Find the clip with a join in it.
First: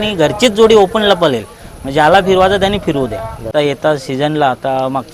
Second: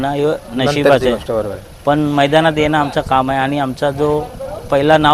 first; 1 cut; at 3.5 s

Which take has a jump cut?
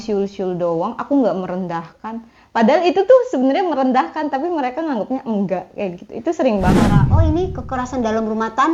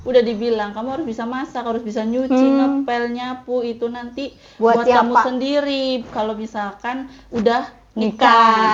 first; 1 cut; at 7.0 s

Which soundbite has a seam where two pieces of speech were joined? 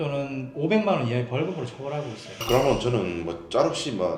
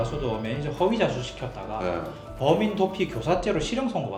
first; 1 cut; at 2.4 s

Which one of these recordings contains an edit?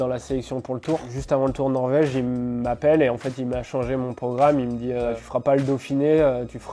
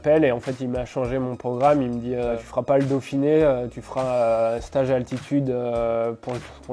first; 1 cut; at 1.1 s

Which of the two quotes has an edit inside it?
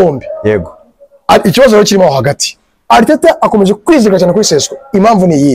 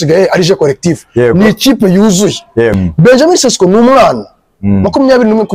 second; 1 cut; at 2.8 s

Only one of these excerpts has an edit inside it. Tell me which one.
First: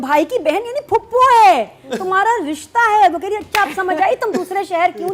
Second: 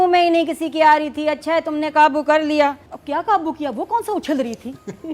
second; 1 cut; at 2.9 s

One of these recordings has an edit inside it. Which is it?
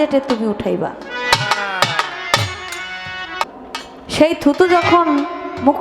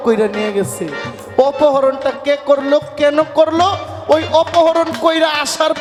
first; 1 cut; at 3.7 s

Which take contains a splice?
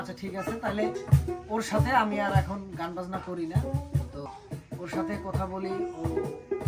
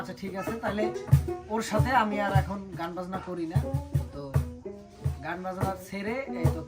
first; 1 cut; at 4.3 s

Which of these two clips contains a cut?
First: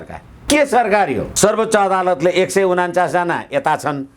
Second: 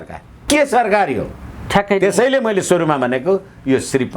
first; 1 cut; at 1.3 s

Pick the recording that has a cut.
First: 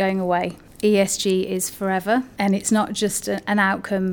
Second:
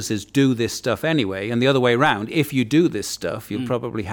first; 1 cut; at 2.3 s

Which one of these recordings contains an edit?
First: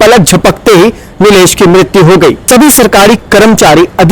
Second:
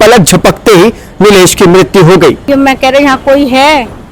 second; 1 cut; at 2.5 s

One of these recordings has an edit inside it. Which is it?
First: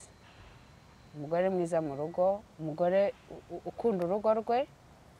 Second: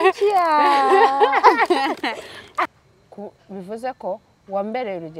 second; 1 cut; at 2.7 s

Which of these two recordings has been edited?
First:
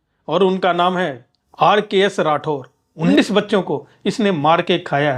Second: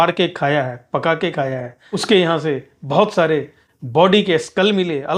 first; 1 cut; at 3.0 s

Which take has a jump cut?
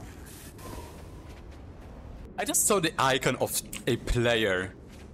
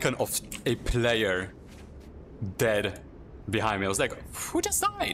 first; 1 cut; at 2.3 s

